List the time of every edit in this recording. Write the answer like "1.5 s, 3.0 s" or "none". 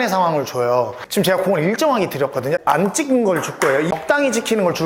1.0 s, 2.6 s, 3.9 s